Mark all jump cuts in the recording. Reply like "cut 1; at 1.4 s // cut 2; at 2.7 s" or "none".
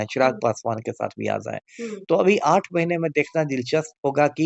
none